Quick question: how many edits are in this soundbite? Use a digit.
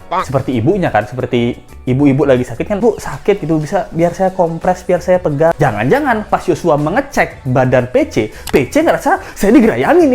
2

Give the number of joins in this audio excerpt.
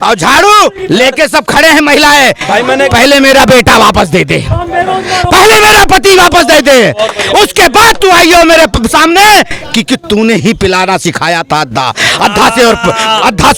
0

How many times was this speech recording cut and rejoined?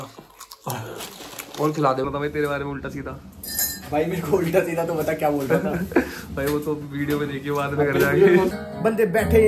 2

